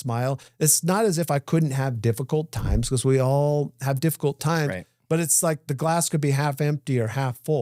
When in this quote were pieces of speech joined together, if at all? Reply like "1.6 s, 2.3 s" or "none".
none